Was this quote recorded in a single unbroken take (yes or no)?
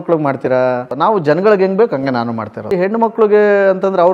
no